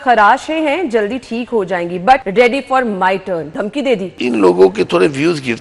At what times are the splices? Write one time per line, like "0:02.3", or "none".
0:02.3
0:03.9